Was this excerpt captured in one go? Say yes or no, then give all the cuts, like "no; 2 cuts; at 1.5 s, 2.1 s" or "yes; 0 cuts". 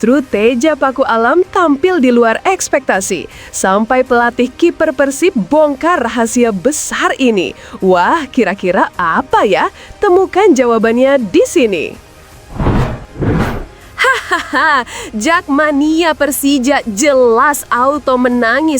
no; 2 cuts; at 12.1 s, 13.7 s